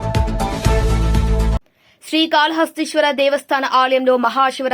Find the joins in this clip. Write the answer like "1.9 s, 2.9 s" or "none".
1.5 s